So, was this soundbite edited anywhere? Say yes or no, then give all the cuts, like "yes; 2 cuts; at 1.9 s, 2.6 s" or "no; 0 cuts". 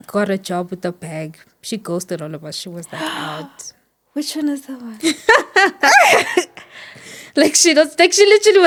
no; 0 cuts